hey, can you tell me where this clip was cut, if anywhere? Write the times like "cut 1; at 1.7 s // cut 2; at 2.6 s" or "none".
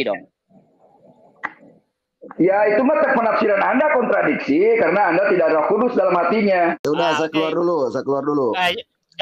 cut 1; at 6.8 s